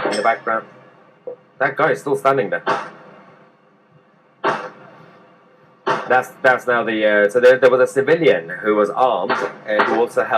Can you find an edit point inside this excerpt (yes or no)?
no